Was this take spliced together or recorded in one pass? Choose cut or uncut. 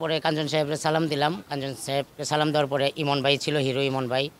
uncut